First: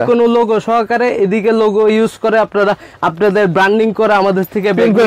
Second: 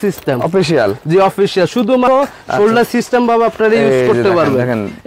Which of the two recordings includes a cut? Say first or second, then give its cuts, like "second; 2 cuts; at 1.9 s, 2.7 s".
second; 1 cut; at 2.1 s